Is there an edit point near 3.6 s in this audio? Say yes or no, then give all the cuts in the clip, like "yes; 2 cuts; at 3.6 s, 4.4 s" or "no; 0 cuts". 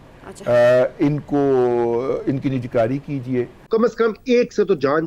yes; 1 cut; at 3.6 s